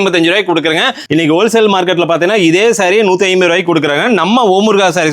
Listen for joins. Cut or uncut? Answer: cut